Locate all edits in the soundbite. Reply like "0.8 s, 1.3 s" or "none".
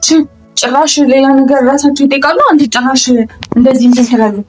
none